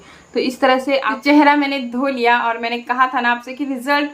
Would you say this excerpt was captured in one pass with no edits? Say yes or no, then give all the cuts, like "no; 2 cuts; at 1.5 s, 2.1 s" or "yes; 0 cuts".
no; 1 cut; at 1.1 s